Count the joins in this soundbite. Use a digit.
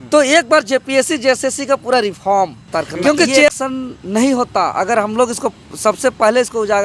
1